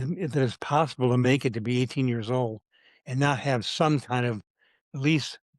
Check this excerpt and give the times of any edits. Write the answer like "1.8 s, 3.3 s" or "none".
none